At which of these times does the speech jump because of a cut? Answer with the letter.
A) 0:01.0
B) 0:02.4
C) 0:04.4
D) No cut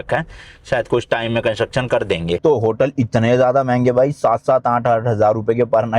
B